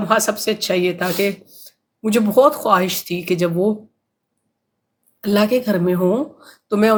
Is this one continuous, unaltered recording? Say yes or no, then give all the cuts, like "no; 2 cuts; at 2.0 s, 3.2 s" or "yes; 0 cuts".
yes; 0 cuts